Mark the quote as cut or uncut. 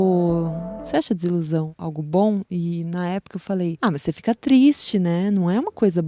uncut